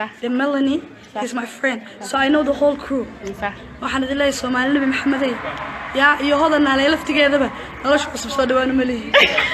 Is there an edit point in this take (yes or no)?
no